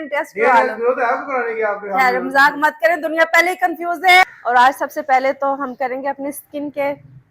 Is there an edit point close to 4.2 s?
yes; 1 cut; at 4.2 s

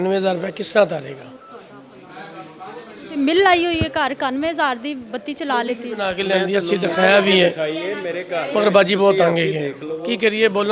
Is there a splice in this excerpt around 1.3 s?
no; 0 cuts

